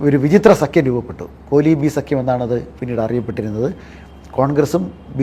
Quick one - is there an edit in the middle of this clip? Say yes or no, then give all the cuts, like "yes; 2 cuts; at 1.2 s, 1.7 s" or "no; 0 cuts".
no; 0 cuts